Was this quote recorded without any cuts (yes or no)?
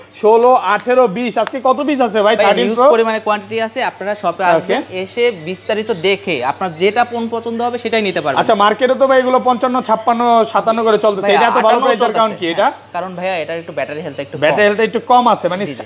yes